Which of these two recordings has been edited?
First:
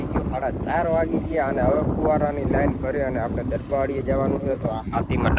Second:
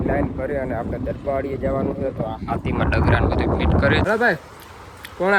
second; 1 cut; at 4.0 s

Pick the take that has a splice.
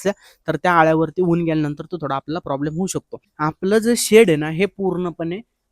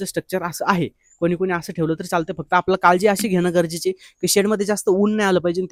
first; 1 cut; at 3.3 s

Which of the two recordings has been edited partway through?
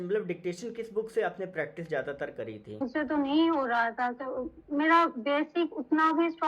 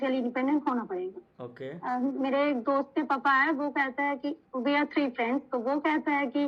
first; 1 cut; at 2.8 s

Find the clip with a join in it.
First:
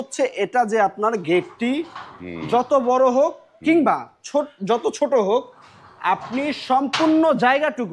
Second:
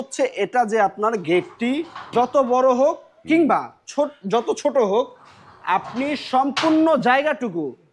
second; 1 cut; at 2.0 s

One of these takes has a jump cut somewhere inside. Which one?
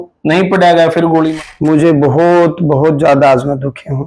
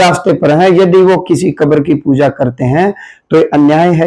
first; 1 cut; at 1.3 s

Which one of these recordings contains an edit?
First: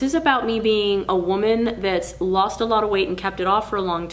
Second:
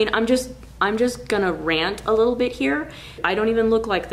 second; 1 cut; at 3.2 s

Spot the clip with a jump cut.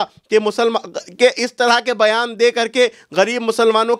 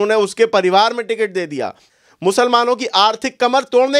second; 1 cut; at 1.8 s

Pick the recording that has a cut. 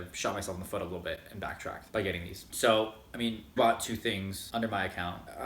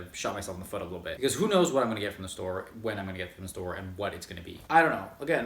second; 2 cuts; at 1.2 s, 4.5 s

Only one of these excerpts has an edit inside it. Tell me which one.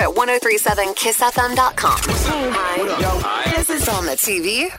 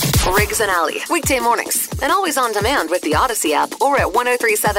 first; 1 cut; at 2.0 s

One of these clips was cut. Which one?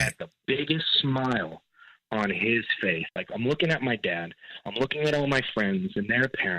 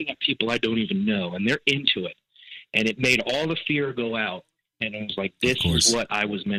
first; 1 cut; at 3.1 s

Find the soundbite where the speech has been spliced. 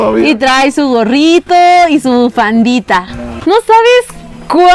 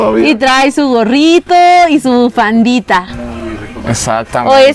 first; 1 cut; at 3.3 s

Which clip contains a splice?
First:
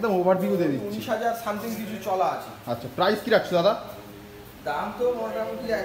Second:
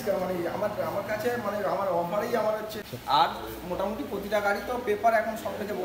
second; 1 cut; at 2.8 s

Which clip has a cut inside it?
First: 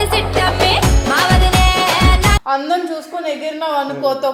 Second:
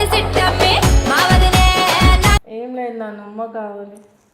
second; 1 cut; at 2.4 s

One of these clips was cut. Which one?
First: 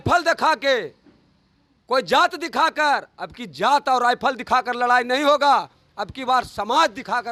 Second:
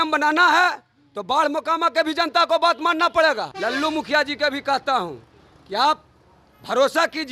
second; 1 cut; at 3.5 s

